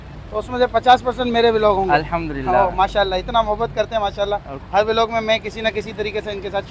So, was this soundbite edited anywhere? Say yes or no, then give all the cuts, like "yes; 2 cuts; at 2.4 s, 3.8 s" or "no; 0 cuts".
no; 0 cuts